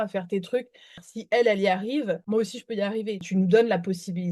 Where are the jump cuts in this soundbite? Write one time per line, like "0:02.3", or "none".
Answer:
0:01.1
0:02.2
0:03.2